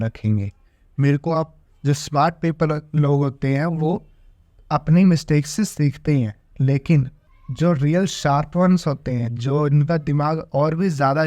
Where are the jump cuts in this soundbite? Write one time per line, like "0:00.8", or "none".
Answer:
0:01.6